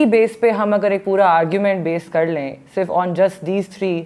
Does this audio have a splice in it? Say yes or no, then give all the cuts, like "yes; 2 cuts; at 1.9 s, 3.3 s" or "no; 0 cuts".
no; 0 cuts